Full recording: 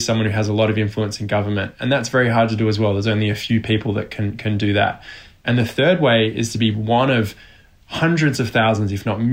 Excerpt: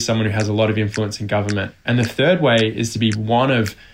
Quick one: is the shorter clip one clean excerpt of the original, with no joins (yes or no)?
no